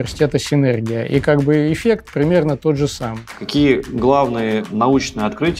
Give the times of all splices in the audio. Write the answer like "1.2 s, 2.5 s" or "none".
3.3 s, 4.7 s